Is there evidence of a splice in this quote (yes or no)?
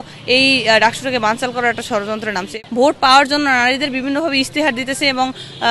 yes